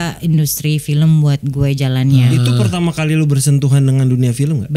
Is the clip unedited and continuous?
no; 1 cut; at 2.3 s

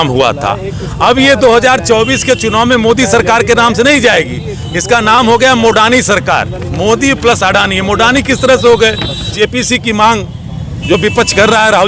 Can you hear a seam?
yes; 1 cut; at 9.3 s

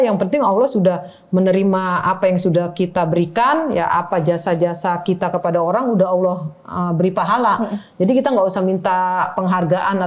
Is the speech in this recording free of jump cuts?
yes; 0 cuts

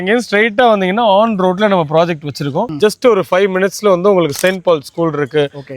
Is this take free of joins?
no; 1 cut; at 2.7 s

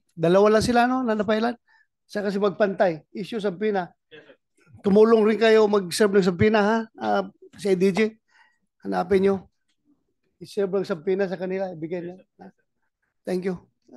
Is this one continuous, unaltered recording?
yes; 0 cuts

